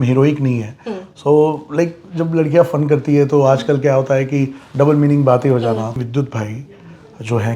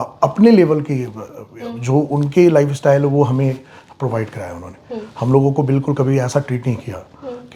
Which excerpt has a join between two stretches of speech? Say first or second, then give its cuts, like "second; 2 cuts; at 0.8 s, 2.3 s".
first; 1 cut; at 6.0 s